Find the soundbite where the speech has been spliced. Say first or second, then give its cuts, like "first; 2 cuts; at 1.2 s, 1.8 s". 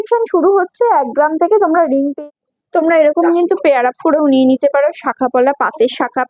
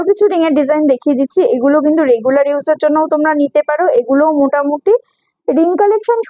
first; 1 cut; at 2.1 s